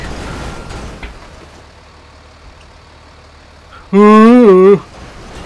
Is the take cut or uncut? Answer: uncut